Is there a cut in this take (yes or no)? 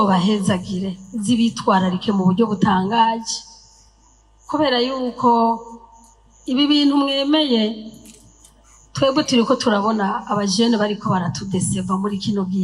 no